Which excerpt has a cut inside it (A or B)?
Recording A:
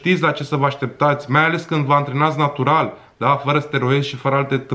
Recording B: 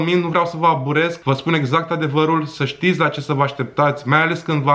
B